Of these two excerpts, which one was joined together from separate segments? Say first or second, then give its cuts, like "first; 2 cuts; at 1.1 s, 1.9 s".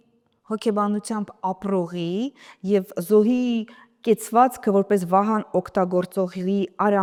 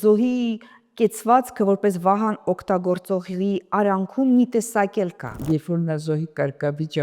second; 1 cut; at 5.3 s